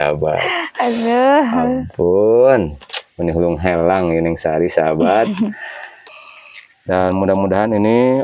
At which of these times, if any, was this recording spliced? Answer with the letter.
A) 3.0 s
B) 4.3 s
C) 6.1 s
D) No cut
C